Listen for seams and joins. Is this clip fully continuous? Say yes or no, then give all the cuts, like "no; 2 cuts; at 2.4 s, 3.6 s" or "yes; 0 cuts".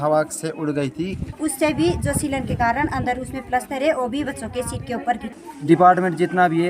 no; 2 cuts; at 1.2 s, 5.3 s